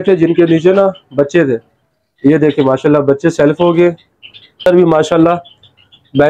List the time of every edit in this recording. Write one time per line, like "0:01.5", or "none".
0:04.6